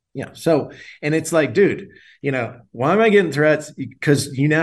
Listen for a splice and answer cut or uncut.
uncut